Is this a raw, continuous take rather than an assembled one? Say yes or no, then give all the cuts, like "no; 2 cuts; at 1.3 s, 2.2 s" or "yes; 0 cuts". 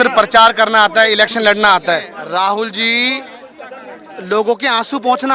no; 1 cut; at 2.2 s